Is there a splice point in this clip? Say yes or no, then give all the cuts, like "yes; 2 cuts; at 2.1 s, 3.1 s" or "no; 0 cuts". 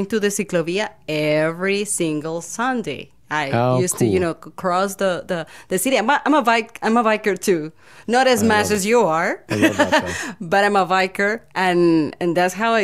no; 0 cuts